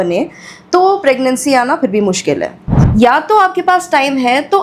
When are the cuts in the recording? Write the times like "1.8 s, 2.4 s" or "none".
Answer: 2.8 s